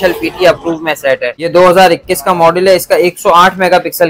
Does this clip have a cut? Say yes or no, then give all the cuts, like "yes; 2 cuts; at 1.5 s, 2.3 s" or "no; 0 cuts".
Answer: yes; 1 cut; at 1.3 s